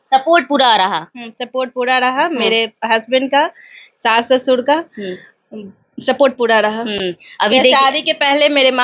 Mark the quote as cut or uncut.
uncut